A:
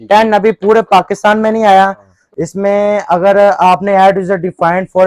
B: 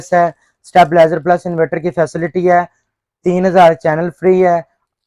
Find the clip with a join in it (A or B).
A